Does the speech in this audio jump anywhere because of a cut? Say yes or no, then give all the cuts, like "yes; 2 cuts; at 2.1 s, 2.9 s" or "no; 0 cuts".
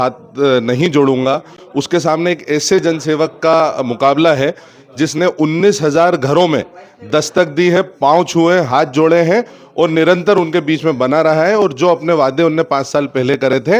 no; 0 cuts